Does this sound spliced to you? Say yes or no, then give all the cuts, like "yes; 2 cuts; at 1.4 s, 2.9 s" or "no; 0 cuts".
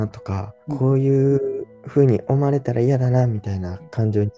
no; 0 cuts